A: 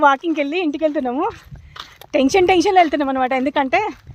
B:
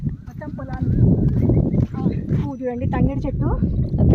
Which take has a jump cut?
B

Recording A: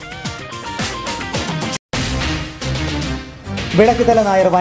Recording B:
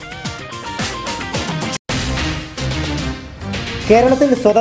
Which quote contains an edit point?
B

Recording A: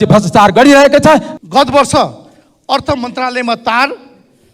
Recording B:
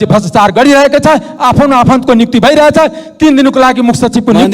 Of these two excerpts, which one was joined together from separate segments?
A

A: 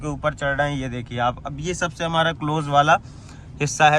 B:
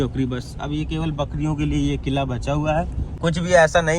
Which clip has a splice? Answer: B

